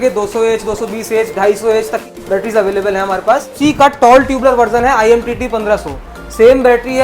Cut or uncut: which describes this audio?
cut